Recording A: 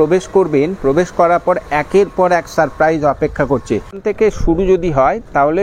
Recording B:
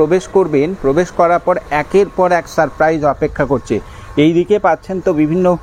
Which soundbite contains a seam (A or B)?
A